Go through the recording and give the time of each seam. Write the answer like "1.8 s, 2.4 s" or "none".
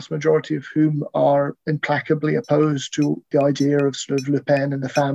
3.3 s